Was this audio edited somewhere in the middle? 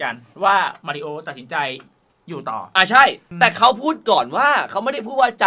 yes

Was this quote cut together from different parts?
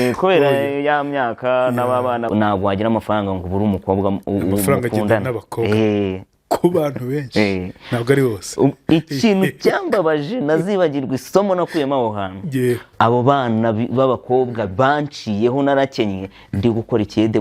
yes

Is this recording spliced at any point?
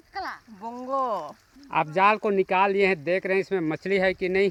no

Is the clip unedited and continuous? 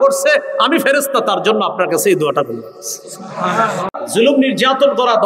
no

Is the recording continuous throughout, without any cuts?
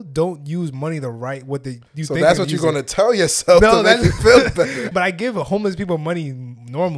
no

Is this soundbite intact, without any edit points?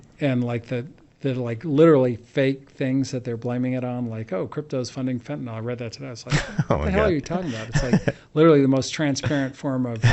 yes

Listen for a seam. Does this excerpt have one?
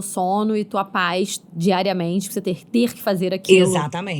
no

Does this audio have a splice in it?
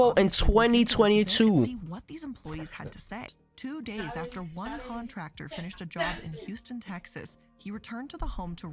yes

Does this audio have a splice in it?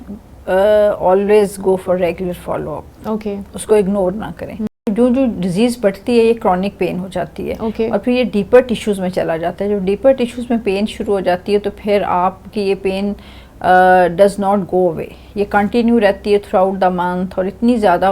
yes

